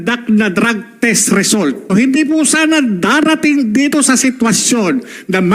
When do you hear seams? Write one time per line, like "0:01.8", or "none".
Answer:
0:01.9